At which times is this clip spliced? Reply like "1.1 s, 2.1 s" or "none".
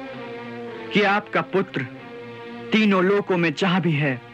none